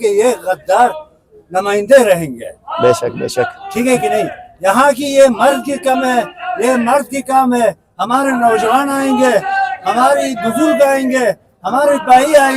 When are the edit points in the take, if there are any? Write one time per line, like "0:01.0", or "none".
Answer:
none